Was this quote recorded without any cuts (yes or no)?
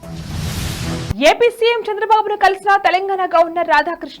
no